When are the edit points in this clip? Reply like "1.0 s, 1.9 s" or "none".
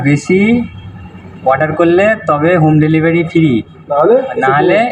none